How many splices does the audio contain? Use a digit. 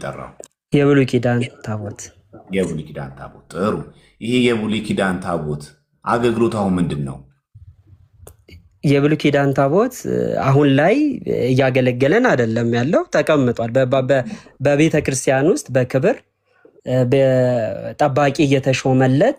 0